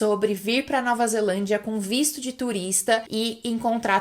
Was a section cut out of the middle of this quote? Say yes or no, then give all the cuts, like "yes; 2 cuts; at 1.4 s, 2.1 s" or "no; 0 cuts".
yes; 1 cut; at 3.1 s